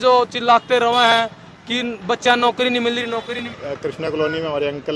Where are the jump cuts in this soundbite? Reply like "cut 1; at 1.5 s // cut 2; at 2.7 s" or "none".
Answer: cut 1; at 3.5 s